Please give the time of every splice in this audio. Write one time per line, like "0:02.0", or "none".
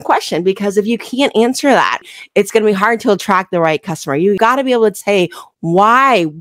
0:02.0